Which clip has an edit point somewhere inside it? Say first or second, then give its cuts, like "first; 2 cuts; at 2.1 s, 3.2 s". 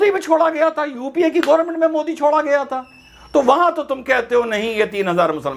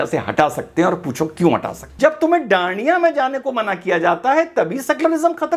second; 1 cut; at 1.8 s